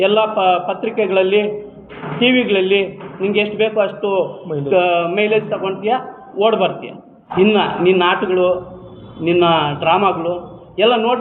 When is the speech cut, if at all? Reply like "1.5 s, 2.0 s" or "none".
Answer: 7.2 s